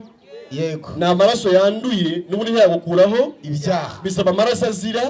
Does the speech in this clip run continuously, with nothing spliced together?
yes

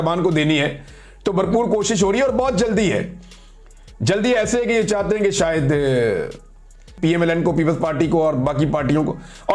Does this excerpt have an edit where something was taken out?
yes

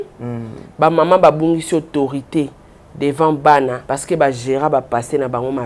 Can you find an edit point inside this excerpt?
yes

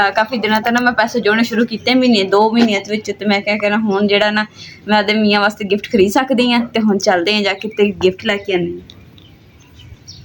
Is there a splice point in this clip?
no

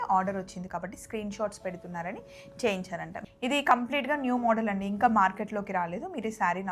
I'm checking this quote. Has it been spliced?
yes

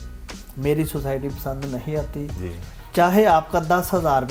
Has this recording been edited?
no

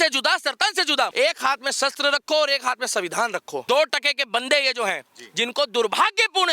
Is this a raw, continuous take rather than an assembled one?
no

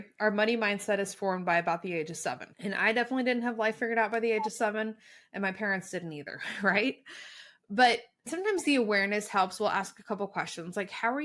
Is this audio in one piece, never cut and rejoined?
no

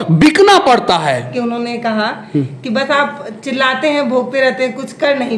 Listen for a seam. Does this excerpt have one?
yes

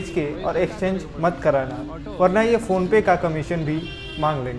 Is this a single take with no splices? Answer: yes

